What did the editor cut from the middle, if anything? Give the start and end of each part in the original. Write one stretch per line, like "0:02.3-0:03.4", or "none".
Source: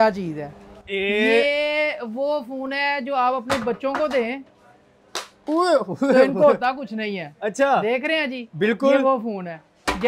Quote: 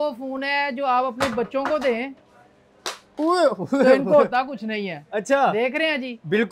none